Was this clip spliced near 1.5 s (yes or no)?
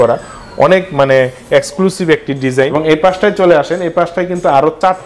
no